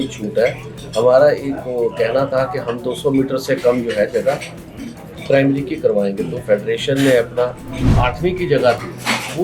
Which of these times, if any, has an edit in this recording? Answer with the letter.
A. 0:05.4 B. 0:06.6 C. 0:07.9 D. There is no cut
C